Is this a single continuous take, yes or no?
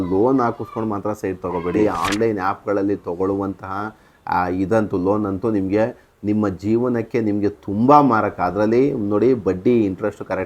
no